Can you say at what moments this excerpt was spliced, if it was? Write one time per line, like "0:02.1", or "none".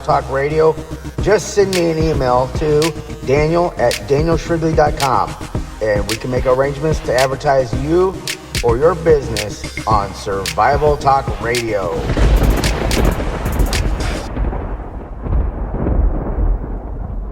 0:12.1